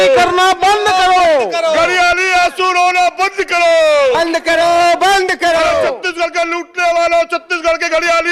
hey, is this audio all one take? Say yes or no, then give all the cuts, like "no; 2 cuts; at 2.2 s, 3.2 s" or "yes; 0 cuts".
yes; 0 cuts